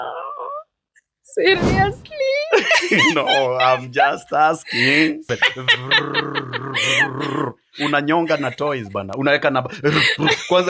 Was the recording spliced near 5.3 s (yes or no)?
yes